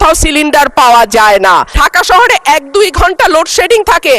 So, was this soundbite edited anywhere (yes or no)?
yes